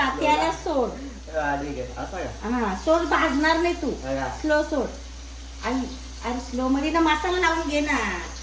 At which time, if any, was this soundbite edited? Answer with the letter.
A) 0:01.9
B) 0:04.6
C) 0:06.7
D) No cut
D